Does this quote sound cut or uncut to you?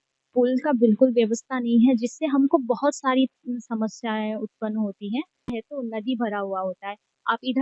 cut